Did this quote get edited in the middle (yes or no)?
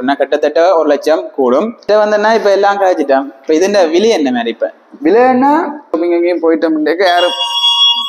yes